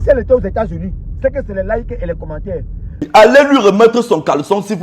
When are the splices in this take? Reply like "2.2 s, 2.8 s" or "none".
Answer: 3.0 s